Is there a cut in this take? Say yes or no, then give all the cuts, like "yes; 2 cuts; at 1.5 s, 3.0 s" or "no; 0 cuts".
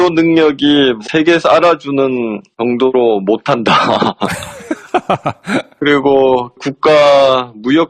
yes; 1 cut; at 1.1 s